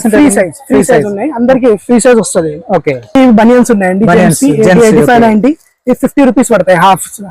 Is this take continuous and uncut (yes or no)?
no